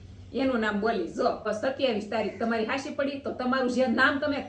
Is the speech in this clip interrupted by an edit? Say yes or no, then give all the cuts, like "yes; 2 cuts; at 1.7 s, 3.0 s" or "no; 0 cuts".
yes; 1 cut; at 1.5 s